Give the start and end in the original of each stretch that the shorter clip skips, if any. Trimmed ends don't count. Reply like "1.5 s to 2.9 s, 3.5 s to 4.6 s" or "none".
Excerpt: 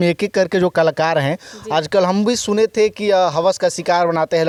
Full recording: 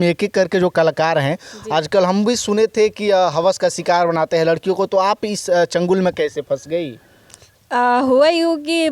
none